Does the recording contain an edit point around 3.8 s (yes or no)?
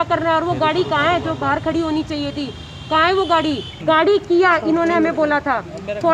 yes